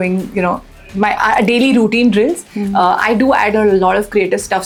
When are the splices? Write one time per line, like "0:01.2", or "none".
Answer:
none

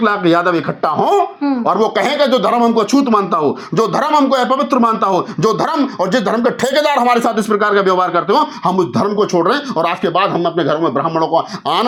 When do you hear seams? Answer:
none

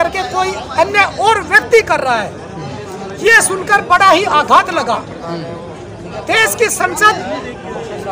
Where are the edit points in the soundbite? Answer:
none

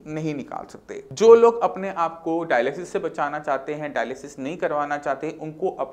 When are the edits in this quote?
0:01.0

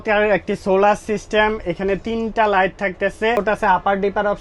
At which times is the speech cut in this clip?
0:03.4

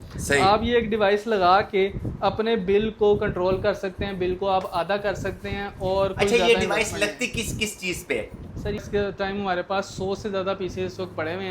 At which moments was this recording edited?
0:08.8

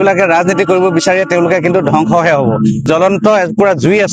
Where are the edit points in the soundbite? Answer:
0:02.8

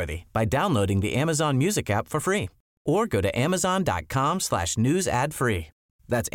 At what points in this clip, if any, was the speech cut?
none

